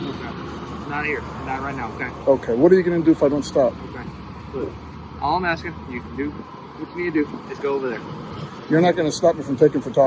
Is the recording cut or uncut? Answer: uncut